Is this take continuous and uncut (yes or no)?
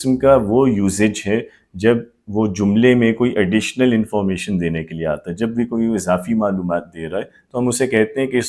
yes